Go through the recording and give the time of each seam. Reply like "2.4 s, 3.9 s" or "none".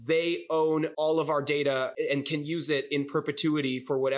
0.9 s, 1.9 s